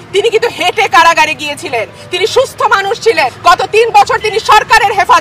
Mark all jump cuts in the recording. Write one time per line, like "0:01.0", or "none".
0:03.3